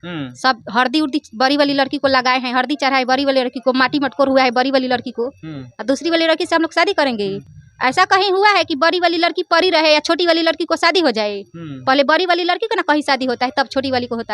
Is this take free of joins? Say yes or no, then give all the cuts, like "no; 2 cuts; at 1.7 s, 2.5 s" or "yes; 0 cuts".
yes; 0 cuts